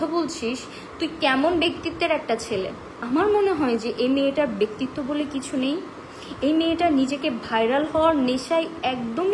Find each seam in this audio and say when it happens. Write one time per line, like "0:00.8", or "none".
0:03.0